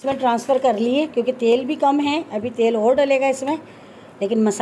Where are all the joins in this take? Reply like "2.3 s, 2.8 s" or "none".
none